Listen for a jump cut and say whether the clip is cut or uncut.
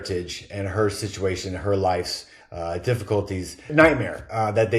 cut